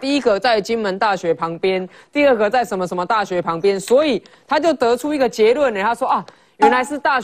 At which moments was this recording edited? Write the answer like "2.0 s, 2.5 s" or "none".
none